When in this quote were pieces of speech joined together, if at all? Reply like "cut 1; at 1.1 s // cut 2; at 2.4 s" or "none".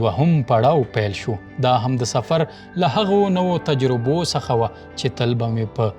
cut 1; at 1.5 s